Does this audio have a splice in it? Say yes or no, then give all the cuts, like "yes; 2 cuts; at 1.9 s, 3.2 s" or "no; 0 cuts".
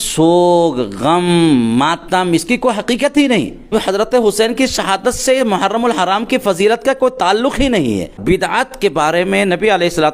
yes; 2 cuts; at 3.7 s, 8.2 s